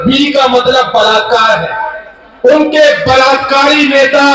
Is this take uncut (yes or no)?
yes